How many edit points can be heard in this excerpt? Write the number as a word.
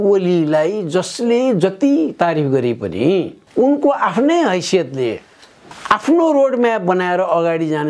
two